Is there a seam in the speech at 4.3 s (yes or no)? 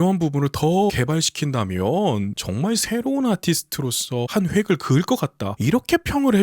yes